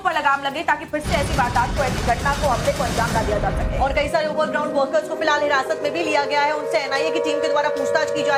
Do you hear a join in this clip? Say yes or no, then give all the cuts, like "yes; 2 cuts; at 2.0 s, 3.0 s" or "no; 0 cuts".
no; 0 cuts